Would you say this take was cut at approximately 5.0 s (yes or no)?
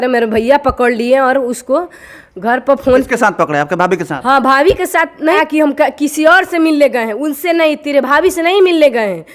no